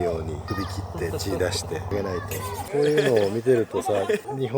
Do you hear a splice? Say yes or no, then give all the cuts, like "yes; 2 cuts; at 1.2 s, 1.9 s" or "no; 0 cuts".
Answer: no; 0 cuts